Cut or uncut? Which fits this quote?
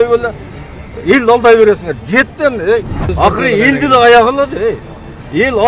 cut